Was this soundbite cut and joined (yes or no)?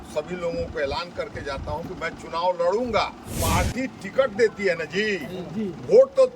yes